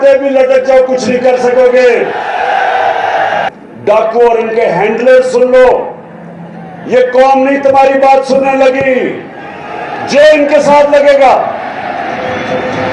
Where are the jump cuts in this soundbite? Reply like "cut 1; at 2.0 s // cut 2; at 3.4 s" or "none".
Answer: cut 1; at 3.5 s